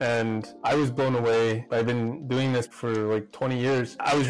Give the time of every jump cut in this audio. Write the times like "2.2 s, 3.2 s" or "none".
2.7 s